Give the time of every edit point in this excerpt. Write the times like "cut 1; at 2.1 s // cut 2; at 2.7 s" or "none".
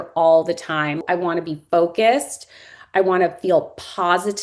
cut 1; at 1.0 s